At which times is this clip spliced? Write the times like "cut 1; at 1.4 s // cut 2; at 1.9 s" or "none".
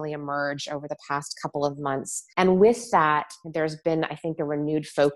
cut 1; at 2.2 s // cut 2; at 3.4 s